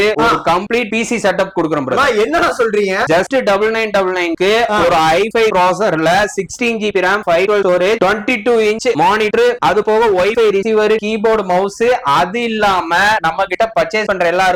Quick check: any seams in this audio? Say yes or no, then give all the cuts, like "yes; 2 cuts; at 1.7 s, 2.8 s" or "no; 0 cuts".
no; 0 cuts